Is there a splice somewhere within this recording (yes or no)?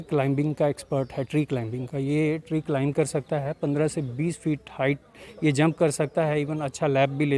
no